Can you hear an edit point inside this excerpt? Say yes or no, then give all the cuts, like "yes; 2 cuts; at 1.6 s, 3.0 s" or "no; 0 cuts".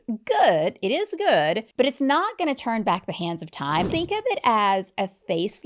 yes; 2 cuts; at 1.7 s, 3.9 s